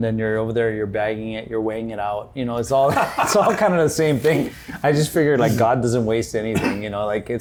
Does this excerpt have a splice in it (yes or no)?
no